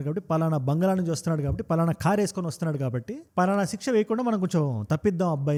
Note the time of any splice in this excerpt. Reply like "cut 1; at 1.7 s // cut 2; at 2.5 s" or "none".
none